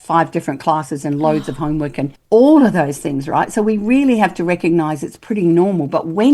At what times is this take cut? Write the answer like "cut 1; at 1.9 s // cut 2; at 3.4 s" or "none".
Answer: cut 1; at 2.2 s